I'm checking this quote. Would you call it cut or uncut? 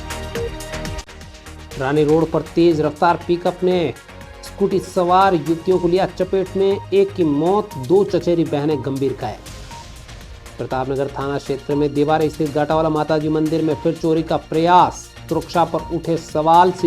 cut